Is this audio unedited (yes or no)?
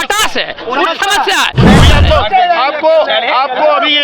no